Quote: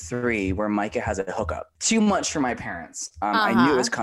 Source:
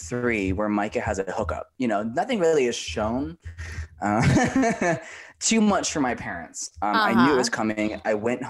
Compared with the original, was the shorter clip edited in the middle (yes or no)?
yes